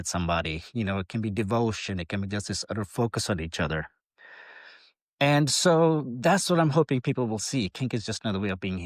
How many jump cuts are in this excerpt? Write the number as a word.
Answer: zero